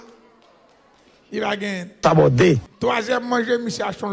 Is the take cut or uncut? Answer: uncut